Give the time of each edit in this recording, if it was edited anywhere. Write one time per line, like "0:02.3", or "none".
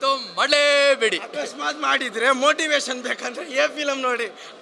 none